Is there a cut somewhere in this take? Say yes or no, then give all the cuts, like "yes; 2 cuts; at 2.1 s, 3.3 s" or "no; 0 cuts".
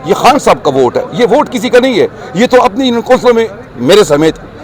no; 0 cuts